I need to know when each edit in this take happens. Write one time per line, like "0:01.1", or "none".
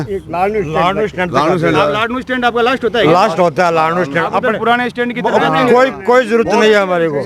none